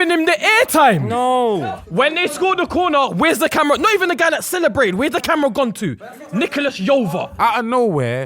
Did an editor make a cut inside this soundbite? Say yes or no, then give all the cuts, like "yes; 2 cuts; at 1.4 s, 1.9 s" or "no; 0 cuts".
yes; 2 cuts; at 1.6 s, 7.3 s